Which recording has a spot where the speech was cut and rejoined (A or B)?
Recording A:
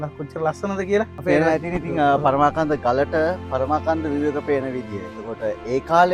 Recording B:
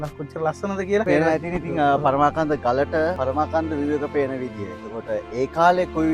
B